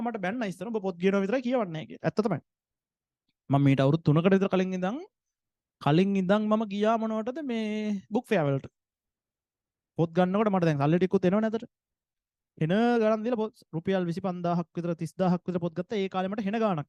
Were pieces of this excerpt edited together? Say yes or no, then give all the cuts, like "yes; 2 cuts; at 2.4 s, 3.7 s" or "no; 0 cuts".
no; 0 cuts